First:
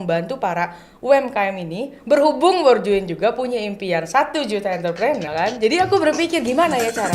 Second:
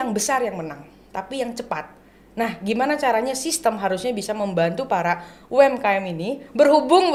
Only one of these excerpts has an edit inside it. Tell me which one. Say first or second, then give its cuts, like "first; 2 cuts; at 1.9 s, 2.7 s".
first; 1 cut; at 5.3 s